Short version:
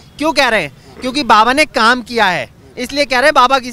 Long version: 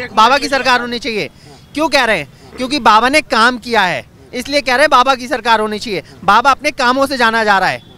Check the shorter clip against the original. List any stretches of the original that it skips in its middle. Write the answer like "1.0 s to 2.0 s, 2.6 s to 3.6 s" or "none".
none